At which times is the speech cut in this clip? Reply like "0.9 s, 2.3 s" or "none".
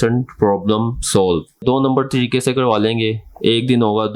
1.5 s